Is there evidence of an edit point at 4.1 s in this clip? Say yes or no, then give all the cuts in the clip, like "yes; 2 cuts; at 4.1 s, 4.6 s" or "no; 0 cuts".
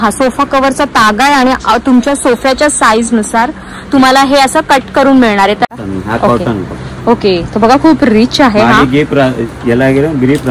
no; 1 cut; at 5.7 s